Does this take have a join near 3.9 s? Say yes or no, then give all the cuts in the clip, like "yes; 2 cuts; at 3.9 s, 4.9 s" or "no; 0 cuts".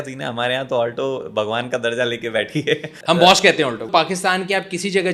yes; 2 cuts; at 2.9 s, 3.9 s